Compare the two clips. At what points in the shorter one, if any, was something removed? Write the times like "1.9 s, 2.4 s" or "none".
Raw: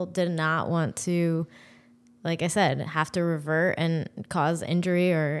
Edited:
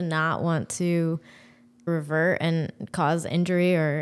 1.9 s